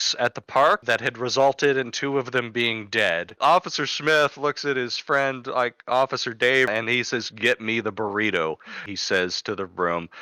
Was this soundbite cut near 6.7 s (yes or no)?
yes